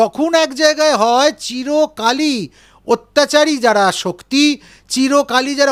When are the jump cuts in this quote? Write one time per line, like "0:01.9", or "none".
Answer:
none

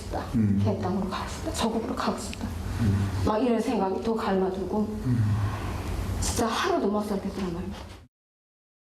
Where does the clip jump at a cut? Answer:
0:06.2

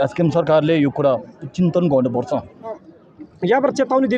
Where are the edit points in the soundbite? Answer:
0:02.9

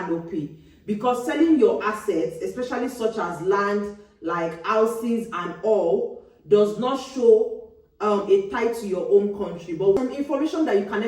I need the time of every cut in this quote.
0:10.0

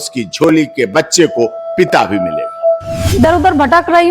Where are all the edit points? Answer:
0:03.0

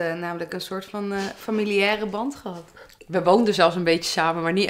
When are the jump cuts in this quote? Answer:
0:03.0

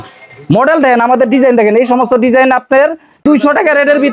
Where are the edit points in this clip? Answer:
0:03.2

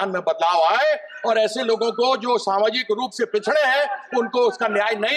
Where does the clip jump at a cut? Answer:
none

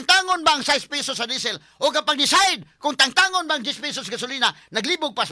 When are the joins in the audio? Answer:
none

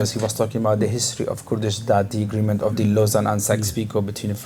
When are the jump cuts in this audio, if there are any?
none

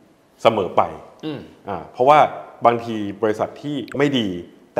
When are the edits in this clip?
none

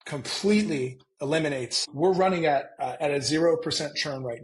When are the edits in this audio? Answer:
0:01.8

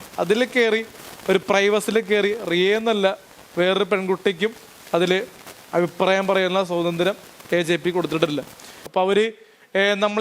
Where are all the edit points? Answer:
0:08.8

